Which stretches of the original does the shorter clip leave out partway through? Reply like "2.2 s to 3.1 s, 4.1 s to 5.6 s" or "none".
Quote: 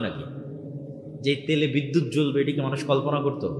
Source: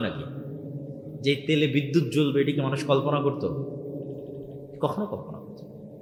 none